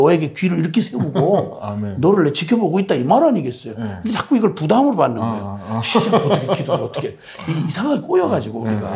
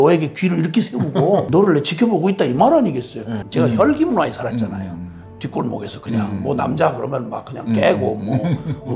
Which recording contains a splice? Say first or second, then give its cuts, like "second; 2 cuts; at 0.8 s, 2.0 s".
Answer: second; 2 cuts; at 1.5 s, 3.3 s